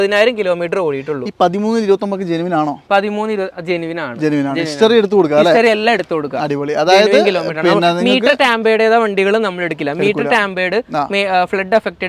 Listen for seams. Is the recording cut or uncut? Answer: uncut